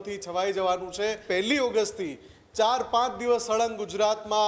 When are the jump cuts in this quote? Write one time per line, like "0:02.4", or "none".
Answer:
0:01.2